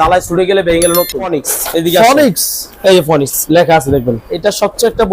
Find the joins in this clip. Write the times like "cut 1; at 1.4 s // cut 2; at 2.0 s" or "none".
cut 1; at 1.4 s // cut 2; at 4.2 s